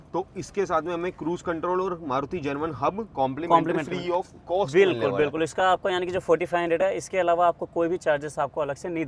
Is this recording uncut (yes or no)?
yes